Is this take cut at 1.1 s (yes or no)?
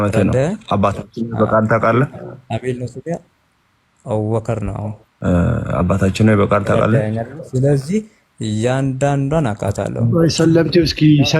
no